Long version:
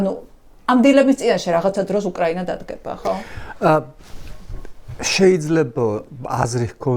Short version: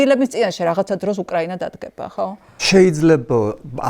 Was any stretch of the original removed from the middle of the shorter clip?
yes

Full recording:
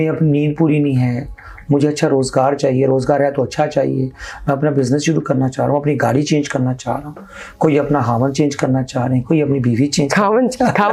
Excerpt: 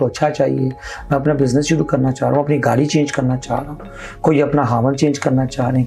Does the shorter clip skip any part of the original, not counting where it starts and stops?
no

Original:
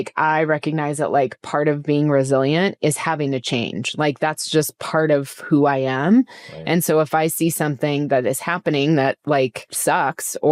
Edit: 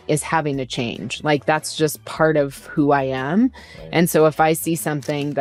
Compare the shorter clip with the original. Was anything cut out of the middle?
no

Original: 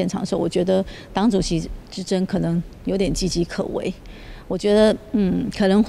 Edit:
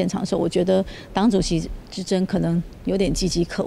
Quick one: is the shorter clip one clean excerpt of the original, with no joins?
yes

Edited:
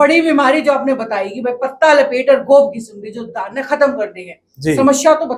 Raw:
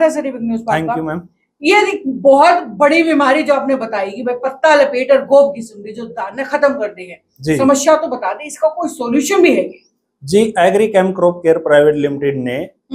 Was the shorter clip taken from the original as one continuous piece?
yes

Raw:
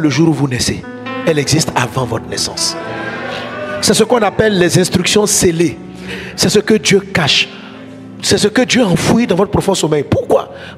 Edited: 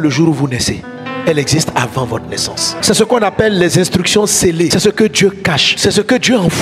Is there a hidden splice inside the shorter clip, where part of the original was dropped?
yes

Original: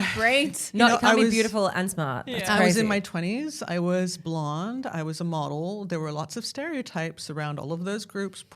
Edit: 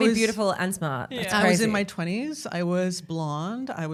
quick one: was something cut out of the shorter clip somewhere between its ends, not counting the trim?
no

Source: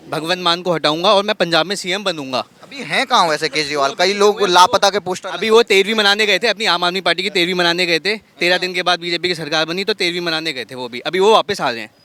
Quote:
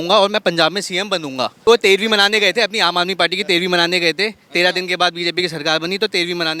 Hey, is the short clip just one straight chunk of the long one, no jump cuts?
no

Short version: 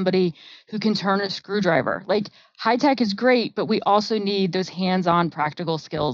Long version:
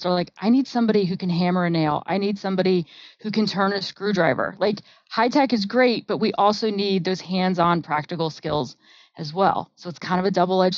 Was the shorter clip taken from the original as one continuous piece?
yes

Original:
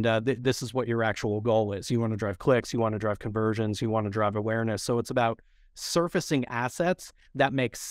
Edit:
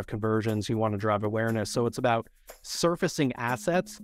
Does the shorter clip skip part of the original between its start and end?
no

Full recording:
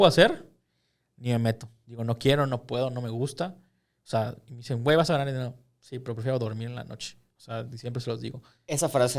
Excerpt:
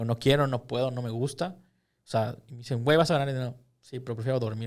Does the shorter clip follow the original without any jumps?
yes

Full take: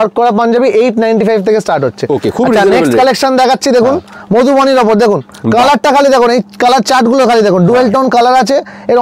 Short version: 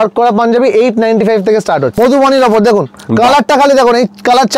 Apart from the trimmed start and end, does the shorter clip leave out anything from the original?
yes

